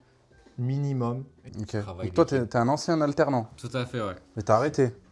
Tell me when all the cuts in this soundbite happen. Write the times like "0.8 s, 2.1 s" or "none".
1.3 s, 4.2 s